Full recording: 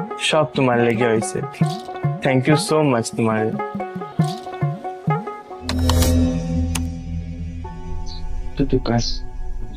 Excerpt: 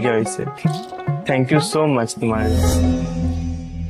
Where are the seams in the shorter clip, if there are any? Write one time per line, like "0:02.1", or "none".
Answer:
0:02.5